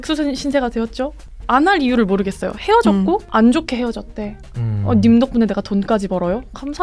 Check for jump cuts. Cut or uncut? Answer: cut